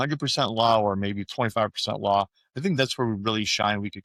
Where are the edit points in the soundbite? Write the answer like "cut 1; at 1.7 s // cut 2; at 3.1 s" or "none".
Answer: none